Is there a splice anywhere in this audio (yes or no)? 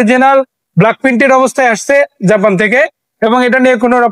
no